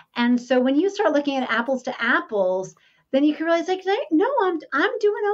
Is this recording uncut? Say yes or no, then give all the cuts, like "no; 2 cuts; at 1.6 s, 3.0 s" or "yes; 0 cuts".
yes; 0 cuts